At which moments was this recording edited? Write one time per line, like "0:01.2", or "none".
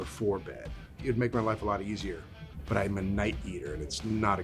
0:01.0
0:02.4